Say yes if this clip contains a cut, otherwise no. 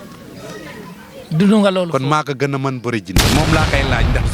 yes